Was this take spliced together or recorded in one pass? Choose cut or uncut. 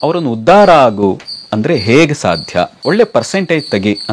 cut